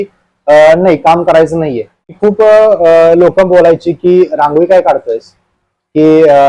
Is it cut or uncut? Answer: cut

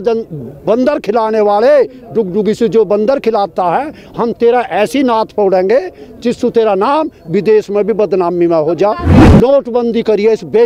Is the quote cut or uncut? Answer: cut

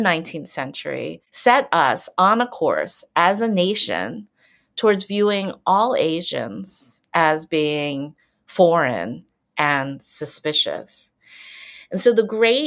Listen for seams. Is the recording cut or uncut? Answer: cut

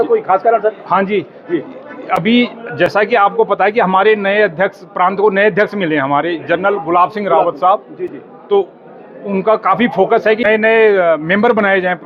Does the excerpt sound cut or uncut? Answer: uncut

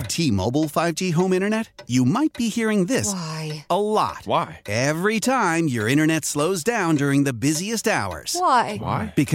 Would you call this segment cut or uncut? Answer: uncut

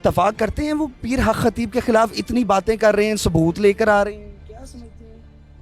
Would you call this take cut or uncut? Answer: uncut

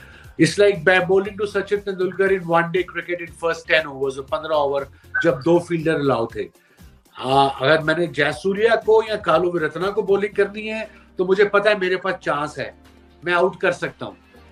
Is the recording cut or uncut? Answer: uncut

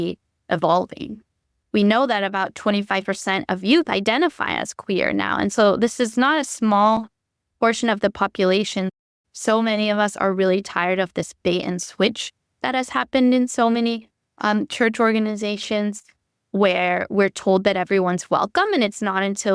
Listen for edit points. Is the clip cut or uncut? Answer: cut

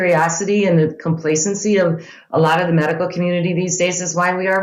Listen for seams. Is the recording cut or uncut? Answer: uncut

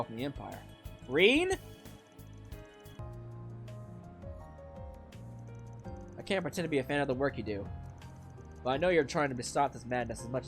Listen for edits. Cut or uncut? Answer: cut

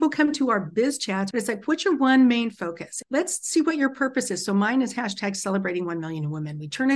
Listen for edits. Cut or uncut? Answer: cut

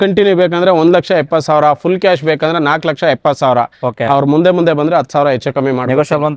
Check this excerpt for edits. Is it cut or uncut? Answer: uncut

